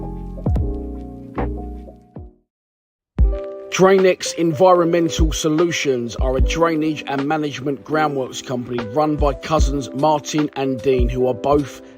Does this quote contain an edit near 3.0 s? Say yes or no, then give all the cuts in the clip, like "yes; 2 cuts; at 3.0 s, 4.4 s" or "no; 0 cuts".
yes; 1 cut; at 3.0 s